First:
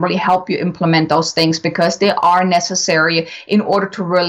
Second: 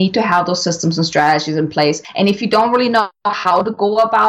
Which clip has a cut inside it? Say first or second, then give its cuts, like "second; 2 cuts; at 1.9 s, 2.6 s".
second; 1 cut; at 2.1 s